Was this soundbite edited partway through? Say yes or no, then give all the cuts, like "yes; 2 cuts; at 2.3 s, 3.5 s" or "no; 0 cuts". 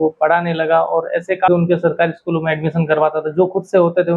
yes; 1 cut; at 1.5 s